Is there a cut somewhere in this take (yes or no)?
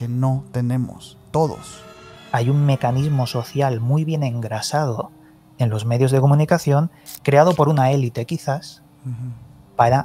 yes